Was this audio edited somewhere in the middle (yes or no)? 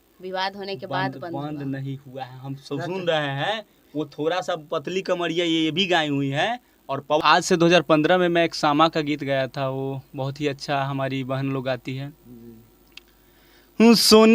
yes